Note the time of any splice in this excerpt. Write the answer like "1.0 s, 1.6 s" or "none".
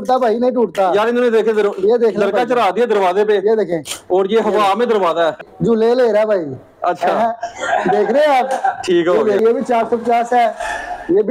5.4 s, 9.4 s